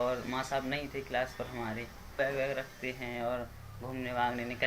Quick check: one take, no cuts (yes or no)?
no